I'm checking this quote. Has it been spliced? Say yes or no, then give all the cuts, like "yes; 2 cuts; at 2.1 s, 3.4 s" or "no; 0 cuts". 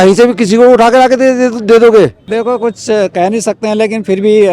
yes; 1 cut; at 2.2 s